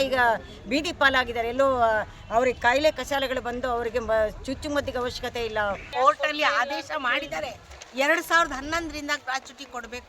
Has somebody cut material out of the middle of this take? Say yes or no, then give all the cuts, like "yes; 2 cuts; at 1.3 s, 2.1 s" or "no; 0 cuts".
yes; 1 cut; at 5.9 s